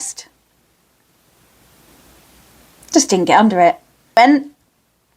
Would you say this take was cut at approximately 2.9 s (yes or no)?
no